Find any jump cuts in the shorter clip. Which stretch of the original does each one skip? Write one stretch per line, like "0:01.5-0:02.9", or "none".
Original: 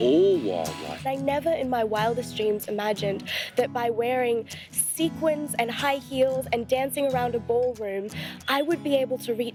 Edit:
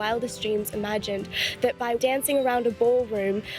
0:03.9-0:06.7